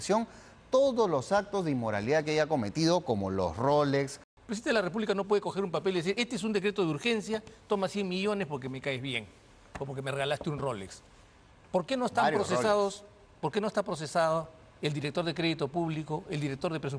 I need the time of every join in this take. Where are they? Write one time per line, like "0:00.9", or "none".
0:04.2